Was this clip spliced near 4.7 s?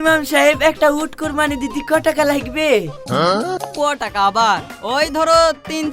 no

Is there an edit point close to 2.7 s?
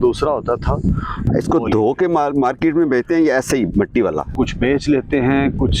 no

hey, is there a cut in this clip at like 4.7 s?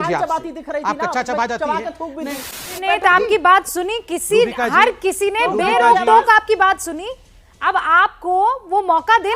no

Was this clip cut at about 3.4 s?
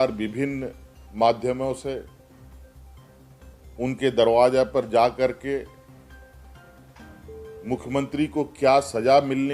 yes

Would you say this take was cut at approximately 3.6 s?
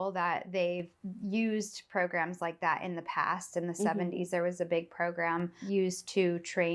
no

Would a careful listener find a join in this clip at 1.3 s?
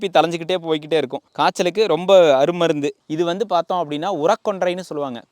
no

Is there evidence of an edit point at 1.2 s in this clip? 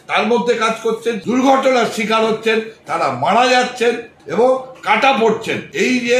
yes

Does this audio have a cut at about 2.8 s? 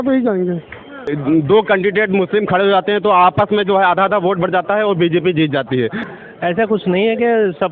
no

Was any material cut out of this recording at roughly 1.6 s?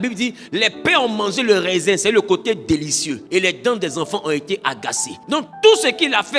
no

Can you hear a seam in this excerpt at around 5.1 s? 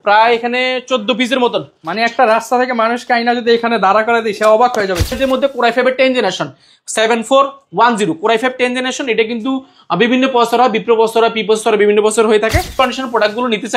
yes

